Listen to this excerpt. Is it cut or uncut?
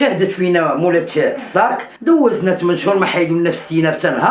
cut